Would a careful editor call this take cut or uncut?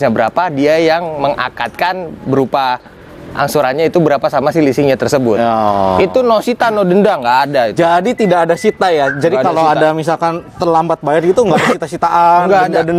uncut